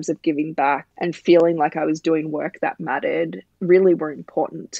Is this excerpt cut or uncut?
cut